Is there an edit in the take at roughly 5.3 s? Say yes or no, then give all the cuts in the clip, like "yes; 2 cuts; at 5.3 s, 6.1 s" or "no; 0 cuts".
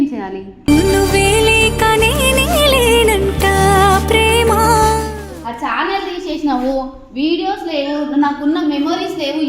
yes; 1 cut; at 5.3 s